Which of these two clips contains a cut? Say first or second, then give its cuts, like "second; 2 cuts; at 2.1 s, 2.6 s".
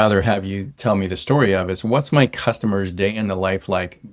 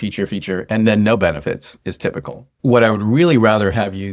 second; 1 cut; at 2.5 s